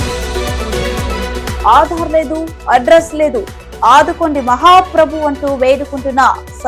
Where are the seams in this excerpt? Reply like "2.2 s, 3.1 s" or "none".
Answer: 1.6 s